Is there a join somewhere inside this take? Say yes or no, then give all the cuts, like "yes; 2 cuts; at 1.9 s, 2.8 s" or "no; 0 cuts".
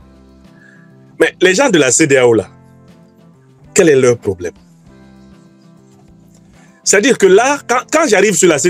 no; 0 cuts